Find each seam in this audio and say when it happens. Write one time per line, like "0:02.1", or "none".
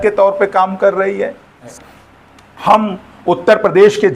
0:01.7

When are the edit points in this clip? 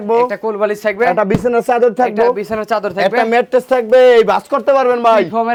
none

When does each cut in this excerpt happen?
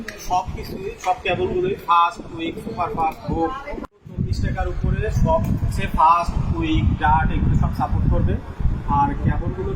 0:03.8

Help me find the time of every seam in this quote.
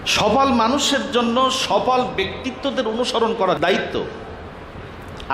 0:03.6

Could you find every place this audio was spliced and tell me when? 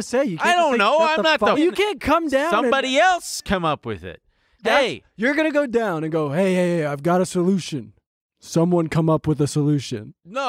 0:01.6

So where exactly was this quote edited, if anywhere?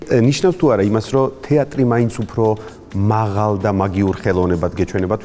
none

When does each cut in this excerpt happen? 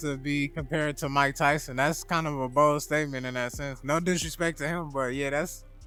none

